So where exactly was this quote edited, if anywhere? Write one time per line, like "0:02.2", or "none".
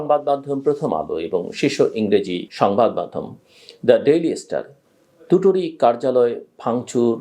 none

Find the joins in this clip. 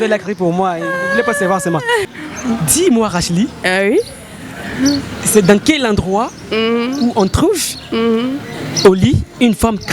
0:02.1

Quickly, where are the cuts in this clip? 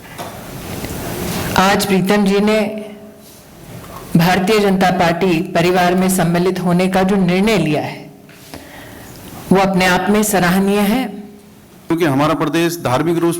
0:11.9

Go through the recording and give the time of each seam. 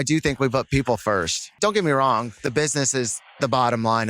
0:01.6

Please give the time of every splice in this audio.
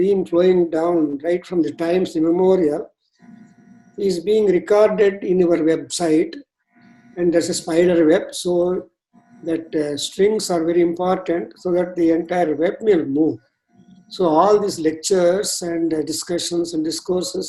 none

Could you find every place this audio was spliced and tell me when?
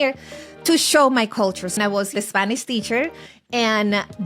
0:01.8

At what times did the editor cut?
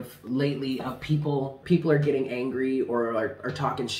0:01.6

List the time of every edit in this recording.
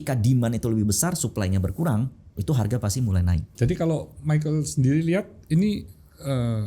0:03.5

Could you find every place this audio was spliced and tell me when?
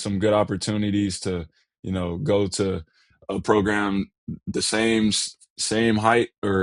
none

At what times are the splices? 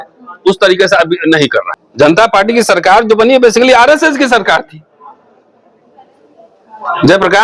0:01.8

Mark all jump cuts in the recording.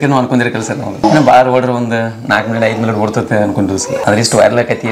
0:01.0
0:04.0

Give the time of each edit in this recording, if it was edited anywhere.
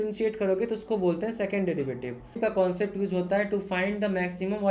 0:02.4

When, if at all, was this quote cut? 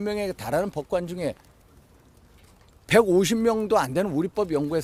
none

